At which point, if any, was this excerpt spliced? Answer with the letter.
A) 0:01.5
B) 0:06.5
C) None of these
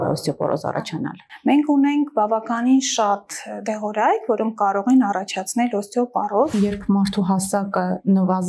B